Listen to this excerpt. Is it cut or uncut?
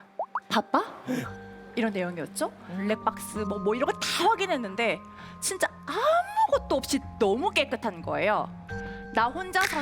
cut